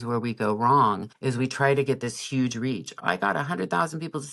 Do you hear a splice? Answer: yes; 2 cuts; at 1.1 s, 3.0 s

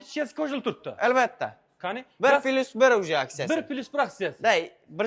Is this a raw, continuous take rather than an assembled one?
yes; 0 cuts

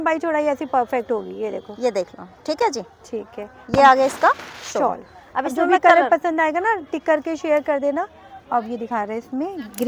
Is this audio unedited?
yes; 0 cuts

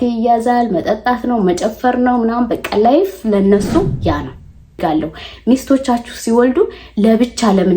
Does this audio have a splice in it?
yes; 1 cut; at 4.8 s

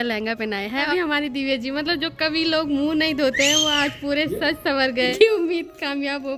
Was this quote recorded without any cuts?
no; 2 cuts; at 0.9 s, 5.1 s

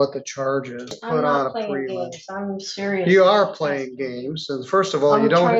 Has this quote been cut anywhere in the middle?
yes; 1 cut; at 1.0 s

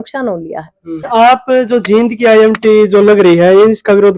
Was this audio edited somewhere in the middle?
yes; 1 cut; at 1.1 s

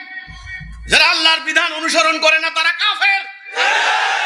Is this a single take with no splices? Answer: yes; 0 cuts

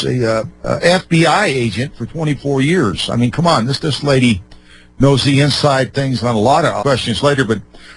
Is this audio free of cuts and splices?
yes; 0 cuts

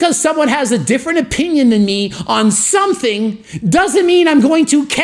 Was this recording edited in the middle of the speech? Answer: no; 0 cuts

